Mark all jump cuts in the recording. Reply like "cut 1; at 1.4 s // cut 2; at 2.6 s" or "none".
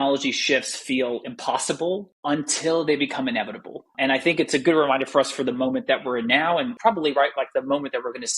none